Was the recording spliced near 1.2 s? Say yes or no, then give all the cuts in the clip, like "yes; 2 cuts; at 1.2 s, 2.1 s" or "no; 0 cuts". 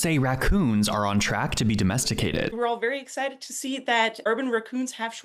no; 2 cuts; at 2.5 s, 4.2 s